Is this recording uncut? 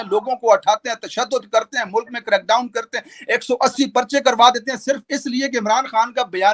yes; 0 cuts

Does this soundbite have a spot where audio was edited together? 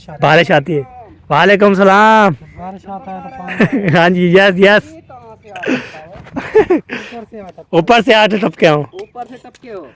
no; 0 cuts

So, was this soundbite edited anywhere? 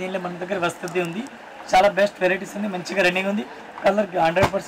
no; 0 cuts

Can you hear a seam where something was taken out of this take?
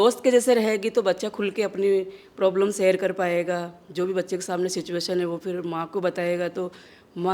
no; 0 cuts

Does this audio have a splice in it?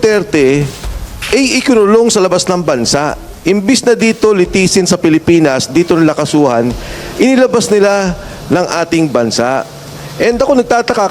no; 0 cuts

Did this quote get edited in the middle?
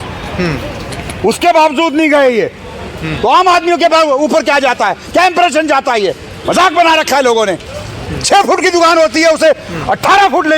no; 0 cuts

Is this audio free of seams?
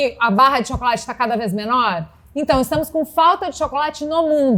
yes; 0 cuts

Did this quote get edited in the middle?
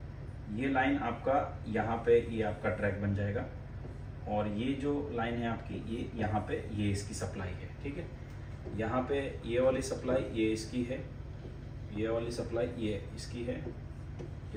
no; 0 cuts

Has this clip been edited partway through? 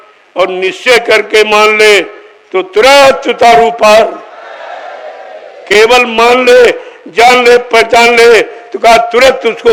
no; 0 cuts

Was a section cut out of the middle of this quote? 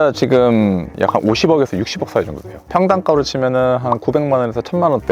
yes; 1 cut; at 0.9 s

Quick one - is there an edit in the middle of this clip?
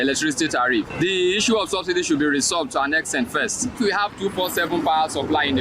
yes; 2 cuts; at 0.9 s, 3.7 s

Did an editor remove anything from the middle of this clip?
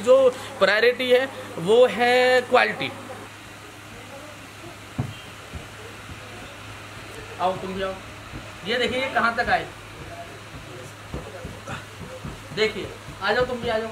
yes; 1 cut; at 3.2 s

